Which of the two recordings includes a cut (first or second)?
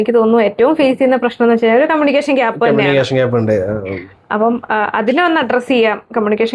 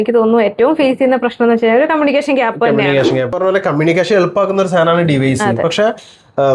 second